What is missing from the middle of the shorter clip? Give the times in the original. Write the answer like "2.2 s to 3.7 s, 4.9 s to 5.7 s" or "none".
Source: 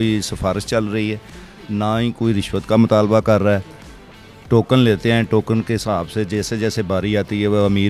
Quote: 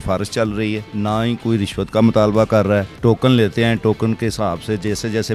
1.2 s to 1.6 s, 3.7 s to 4.4 s